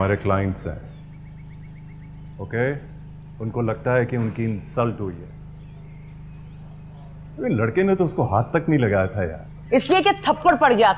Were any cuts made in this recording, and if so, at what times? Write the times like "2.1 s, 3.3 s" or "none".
none